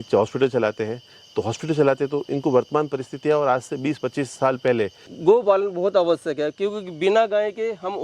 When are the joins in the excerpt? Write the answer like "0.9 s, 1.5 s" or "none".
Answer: 5.0 s